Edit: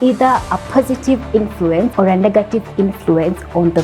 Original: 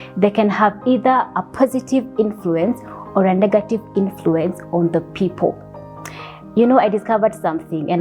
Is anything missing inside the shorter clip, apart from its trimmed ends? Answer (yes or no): yes